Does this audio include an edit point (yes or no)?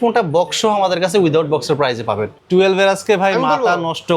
yes